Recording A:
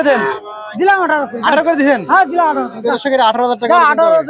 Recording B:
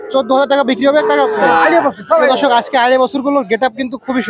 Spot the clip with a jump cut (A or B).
B